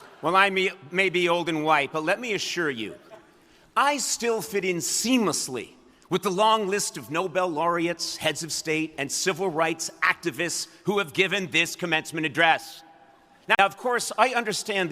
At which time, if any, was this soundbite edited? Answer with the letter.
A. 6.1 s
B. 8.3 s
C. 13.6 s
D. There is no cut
C